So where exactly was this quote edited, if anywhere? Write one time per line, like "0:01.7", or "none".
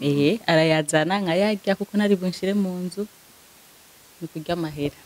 none